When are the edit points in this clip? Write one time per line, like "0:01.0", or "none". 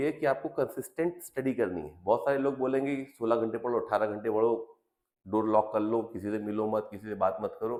none